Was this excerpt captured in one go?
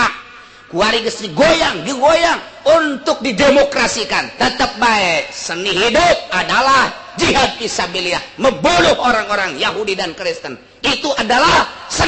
yes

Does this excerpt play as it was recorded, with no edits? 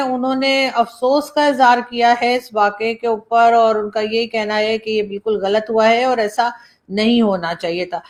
yes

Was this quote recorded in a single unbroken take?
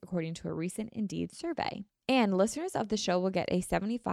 no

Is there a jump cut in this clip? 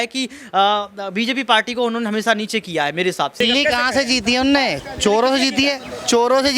yes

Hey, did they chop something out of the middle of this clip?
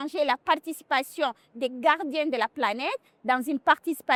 no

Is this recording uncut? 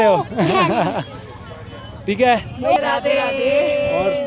no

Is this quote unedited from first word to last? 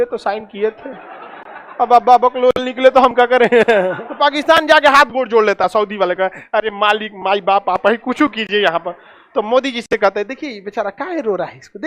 no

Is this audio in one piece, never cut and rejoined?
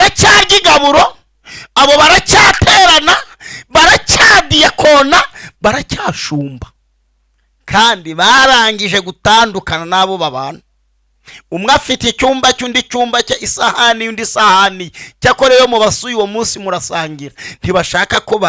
yes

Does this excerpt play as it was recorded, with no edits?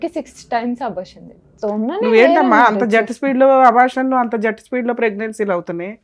no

